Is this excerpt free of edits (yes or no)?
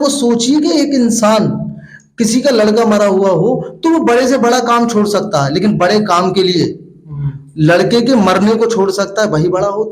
yes